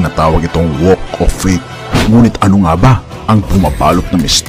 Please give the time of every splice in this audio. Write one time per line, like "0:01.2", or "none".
0:02.1